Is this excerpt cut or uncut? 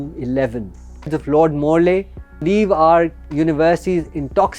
cut